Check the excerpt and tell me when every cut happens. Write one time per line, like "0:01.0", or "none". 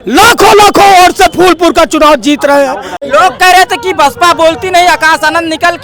0:02.9